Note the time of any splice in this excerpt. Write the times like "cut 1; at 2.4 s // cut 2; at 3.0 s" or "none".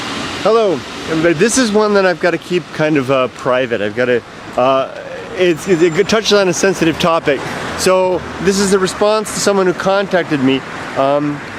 none